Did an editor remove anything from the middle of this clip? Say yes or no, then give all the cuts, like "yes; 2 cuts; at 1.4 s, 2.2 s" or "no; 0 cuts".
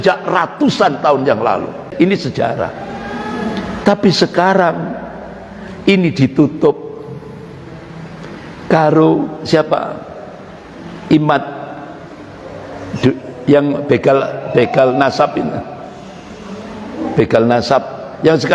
yes; 1 cut; at 1.9 s